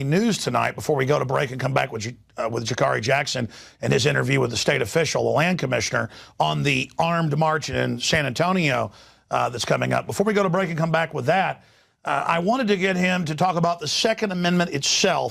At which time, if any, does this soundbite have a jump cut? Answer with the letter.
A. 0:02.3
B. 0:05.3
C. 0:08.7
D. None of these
B